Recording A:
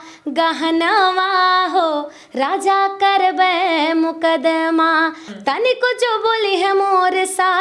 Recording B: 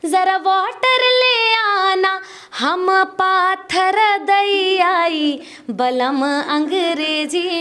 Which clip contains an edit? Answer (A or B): A